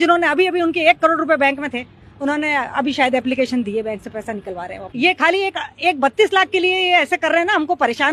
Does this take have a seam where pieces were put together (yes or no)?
yes